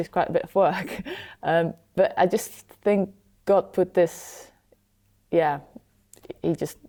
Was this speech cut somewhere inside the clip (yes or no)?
no